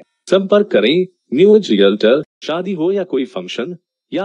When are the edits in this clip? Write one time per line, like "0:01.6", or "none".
0:02.4